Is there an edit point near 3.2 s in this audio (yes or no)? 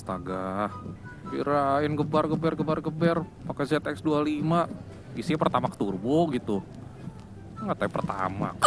no